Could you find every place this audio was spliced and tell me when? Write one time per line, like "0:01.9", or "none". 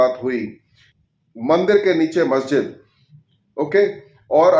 none